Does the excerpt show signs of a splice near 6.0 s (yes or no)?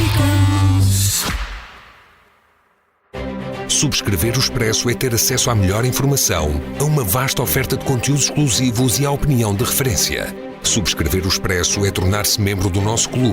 no